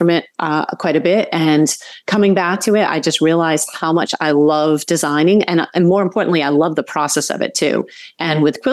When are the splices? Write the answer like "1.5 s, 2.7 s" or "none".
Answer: none